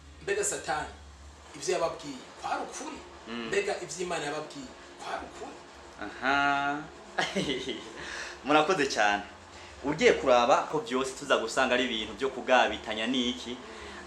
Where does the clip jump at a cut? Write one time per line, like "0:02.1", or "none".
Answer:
0:10.8